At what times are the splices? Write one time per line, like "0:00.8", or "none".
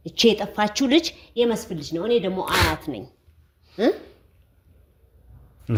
none

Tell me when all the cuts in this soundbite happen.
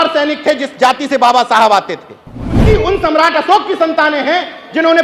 0:02.6

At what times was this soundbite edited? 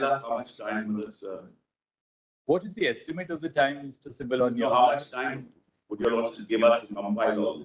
none

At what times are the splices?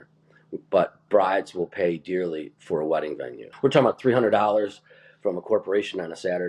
0:03.5

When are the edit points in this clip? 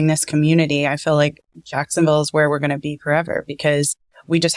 none

